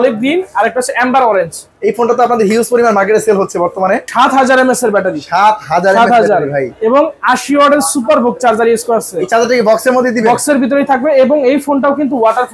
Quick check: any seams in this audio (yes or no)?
yes